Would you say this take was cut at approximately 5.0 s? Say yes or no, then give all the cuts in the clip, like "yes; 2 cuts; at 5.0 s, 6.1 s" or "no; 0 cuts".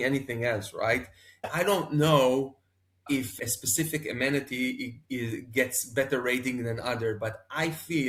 no; 0 cuts